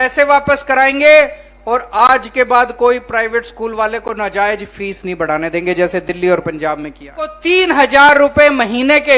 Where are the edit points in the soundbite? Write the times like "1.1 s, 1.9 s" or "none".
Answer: 7.4 s